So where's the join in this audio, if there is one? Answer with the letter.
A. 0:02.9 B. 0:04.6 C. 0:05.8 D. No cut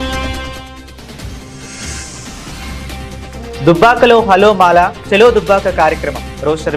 A